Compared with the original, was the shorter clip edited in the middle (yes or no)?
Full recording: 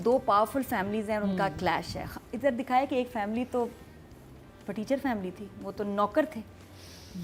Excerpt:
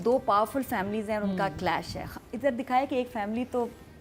no